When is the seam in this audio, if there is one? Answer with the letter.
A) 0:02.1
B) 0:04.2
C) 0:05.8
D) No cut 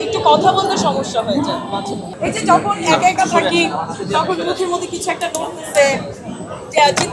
A